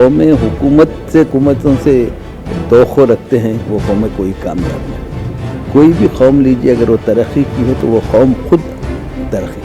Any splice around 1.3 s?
yes; 1 cut; at 1.3 s

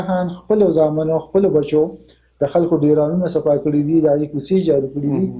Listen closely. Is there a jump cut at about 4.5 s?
no; 0 cuts

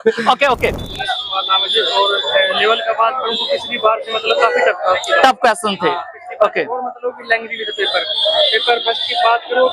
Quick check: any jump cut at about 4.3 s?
no; 1 cut; at 0.9 s

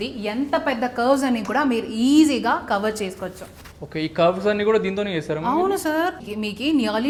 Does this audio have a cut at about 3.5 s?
no; 0 cuts

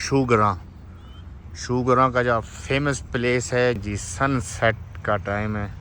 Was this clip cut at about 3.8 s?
yes; 1 cut; at 3.8 s

